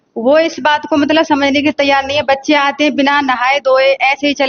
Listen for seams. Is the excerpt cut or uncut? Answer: uncut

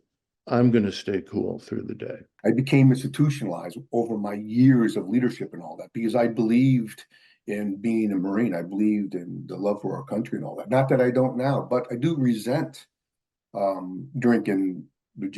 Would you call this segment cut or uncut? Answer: cut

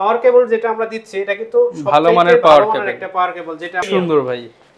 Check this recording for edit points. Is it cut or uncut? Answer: cut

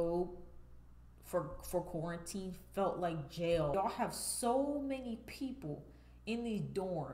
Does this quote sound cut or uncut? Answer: cut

